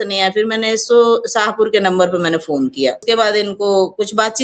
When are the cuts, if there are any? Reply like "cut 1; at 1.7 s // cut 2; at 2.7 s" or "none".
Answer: cut 1; at 3.0 s